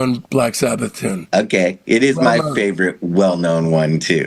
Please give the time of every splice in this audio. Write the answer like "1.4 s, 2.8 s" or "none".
1.3 s

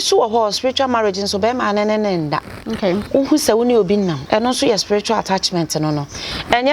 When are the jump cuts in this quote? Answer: 4.2 s

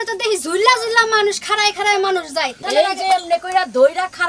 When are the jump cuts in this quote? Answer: 2.6 s

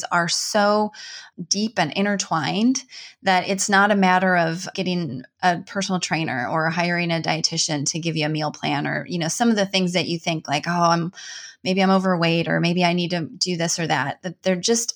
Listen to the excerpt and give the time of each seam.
1.2 s, 4.7 s

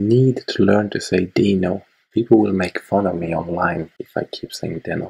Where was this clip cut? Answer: 1.9 s, 4.0 s

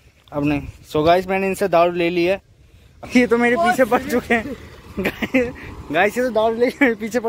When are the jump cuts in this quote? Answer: 3.1 s

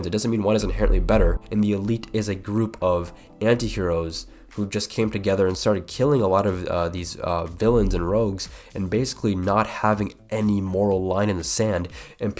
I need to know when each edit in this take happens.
1.4 s

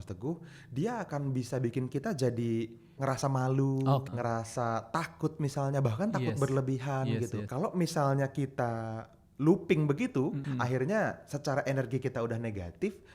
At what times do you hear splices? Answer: 3.0 s, 4.1 s, 7.4 s, 10.4 s

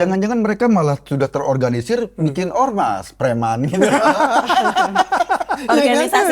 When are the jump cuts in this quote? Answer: none

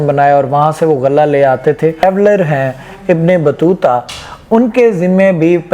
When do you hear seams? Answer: 2.0 s

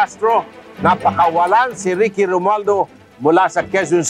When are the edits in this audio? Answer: none

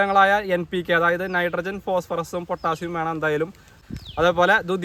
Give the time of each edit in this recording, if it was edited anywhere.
none

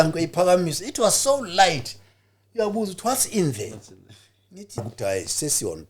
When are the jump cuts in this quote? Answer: 4.8 s

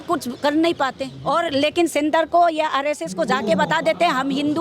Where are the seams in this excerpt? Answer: 1.1 s

